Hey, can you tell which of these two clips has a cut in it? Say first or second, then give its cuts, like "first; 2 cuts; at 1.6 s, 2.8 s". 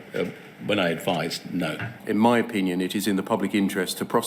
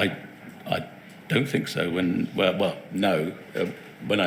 first; 1 cut; at 1.9 s